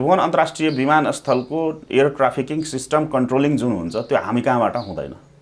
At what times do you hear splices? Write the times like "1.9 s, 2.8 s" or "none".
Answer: none